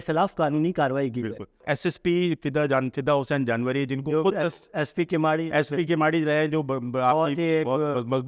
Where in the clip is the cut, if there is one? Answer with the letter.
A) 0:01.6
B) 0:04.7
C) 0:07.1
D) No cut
A